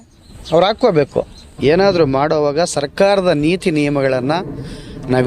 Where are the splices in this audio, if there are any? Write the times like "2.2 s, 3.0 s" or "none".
1.4 s

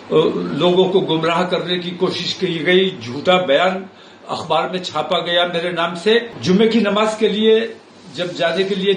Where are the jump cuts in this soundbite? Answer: 6.3 s

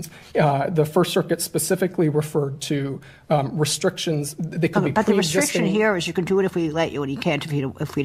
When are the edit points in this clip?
none

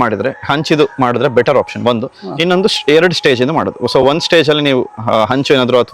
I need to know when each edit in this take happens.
none

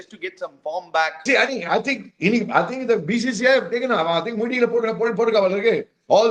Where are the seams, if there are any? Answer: 1.2 s

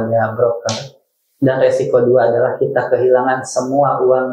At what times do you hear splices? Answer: none

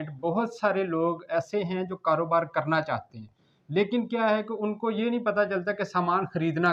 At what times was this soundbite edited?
none

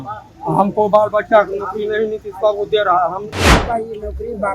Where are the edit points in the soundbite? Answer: 3.5 s

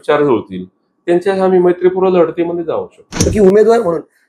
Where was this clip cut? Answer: 3.2 s

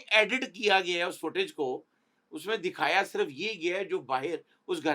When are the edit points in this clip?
none

